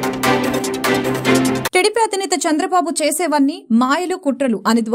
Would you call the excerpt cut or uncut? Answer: cut